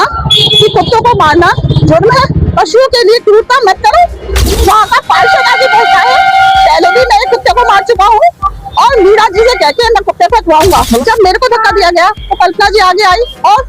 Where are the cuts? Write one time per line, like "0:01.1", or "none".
0:02.4
0:04.7
0:11.0